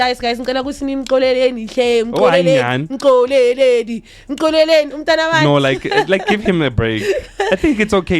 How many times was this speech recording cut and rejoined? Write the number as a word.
zero